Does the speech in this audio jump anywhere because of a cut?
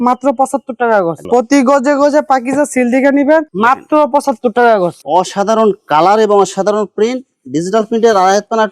yes; 2 cuts; at 1.2 s, 5.0 s

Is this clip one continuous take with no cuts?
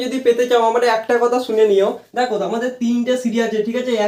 yes; 0 cuts

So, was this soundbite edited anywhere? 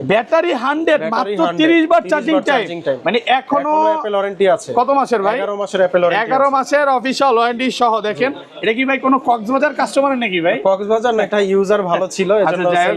no; 0 cuts

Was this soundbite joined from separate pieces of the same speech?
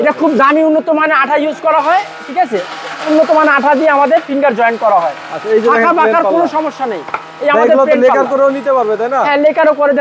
no; 0 cuts

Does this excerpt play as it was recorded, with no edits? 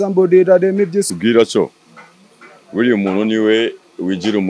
no; 1 cut; at 1.1 s

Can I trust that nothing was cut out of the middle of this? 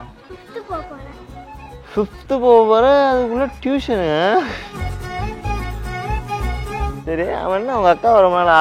yes; 0 cuts

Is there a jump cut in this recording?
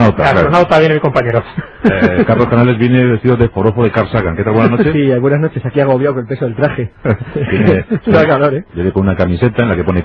yes; 1 cut; at 1.6 s

